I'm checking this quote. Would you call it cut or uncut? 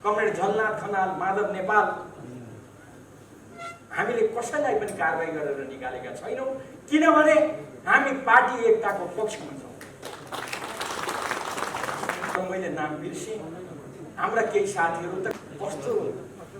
cut